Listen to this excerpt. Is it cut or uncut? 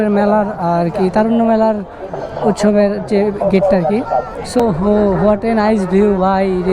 cut